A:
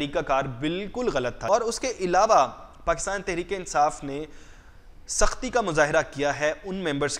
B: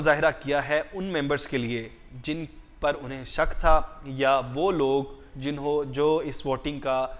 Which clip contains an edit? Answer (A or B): A